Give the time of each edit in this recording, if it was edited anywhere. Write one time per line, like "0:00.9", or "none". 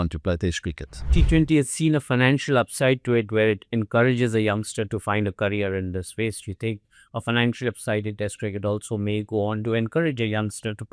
0:01.0